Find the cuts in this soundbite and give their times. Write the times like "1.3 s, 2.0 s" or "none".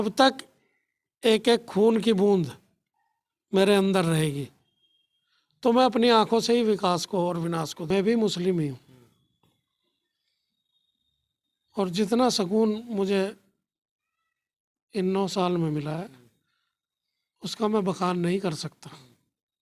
7.9 s